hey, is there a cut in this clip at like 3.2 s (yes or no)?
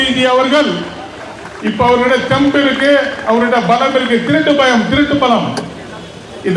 no